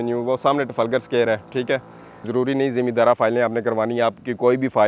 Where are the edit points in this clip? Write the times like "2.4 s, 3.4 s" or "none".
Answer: 2.3 s